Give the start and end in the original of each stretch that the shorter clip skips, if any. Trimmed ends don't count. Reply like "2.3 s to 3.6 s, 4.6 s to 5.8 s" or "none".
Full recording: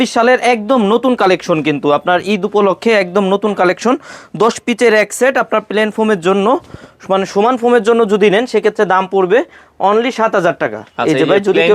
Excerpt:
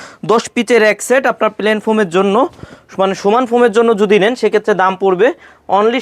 none